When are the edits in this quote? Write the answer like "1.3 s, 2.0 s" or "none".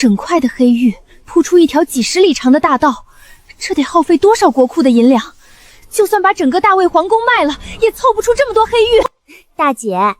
9.3 s